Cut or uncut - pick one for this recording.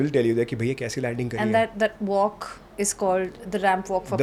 uncut